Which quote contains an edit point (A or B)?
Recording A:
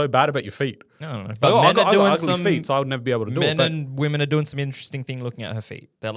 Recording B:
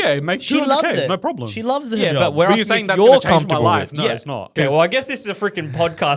B